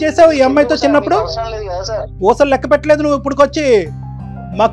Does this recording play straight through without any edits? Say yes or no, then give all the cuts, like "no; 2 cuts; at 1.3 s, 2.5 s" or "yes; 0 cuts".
no; 1 cut; at 2.1 s